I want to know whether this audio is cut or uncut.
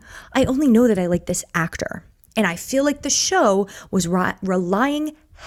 uncut